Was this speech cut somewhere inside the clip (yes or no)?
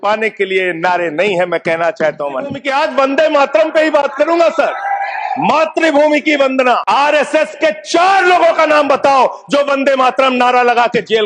yes